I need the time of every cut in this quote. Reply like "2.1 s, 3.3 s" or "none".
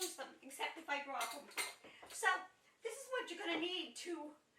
none